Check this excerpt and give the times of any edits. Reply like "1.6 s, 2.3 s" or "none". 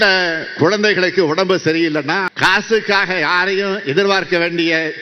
2.3 s